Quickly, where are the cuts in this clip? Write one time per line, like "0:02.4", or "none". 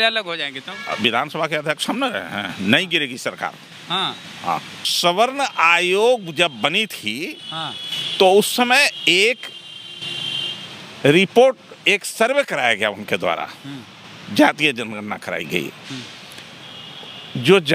0:04.8